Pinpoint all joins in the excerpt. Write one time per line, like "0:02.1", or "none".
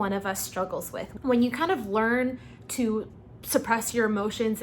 0:01.1